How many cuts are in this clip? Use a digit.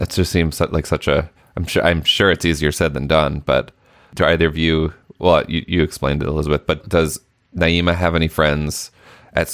2